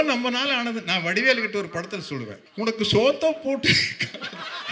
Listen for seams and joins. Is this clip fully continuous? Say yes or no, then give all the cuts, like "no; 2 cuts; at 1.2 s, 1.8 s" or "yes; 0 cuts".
no; 1 cut; at 2.4 s